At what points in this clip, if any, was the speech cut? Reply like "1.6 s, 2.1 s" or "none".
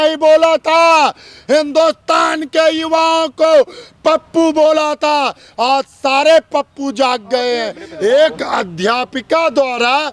7.8 s